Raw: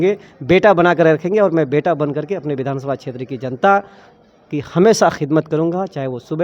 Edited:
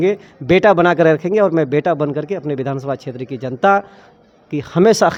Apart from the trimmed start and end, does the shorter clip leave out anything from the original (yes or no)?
no